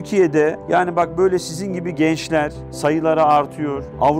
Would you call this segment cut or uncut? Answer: uncut